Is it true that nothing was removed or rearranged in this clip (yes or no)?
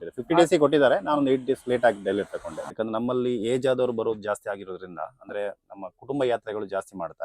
no